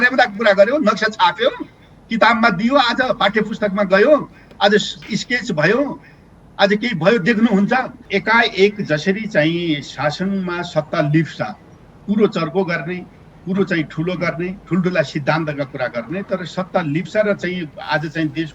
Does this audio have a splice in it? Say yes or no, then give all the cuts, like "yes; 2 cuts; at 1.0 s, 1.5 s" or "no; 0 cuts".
yes; 1 cut; at 8.0 s